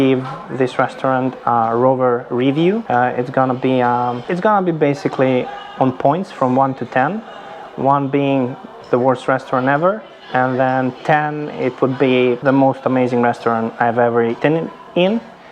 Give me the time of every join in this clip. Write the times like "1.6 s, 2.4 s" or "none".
2.8 s, 4.2 s, 12.4 s, 14.4 s